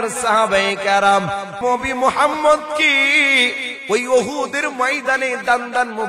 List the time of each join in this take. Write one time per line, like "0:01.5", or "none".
0:01.5